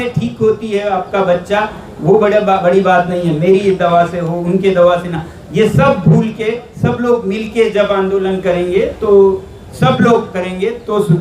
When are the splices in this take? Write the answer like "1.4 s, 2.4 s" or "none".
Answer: 9.6 s